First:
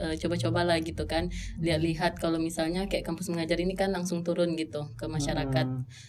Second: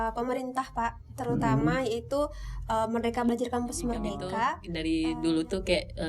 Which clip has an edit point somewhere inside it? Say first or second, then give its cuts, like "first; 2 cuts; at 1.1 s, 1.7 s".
second; 1 cut; at 4.7 s